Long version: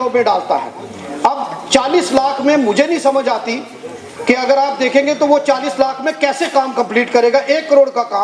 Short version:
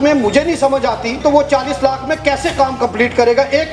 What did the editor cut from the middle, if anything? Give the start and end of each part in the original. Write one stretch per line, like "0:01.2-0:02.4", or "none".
0:03.6-0:05.2